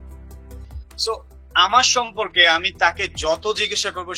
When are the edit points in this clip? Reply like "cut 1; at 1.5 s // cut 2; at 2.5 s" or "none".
cut 1; at 1.0 s